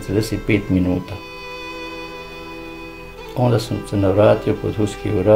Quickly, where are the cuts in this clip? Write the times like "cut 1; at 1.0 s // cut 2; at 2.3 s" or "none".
none